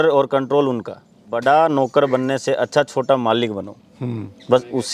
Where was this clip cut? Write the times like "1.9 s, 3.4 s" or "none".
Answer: 1.2 s